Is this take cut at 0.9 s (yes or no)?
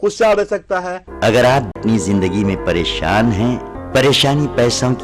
yes